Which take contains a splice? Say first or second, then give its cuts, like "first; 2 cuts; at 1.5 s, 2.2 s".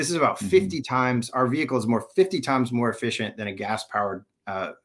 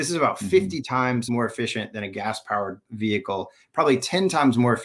second; 2 cuts; at 1.3 s, 2.8 s